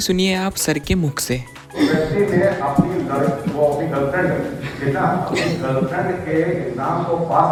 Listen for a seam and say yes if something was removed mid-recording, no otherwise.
no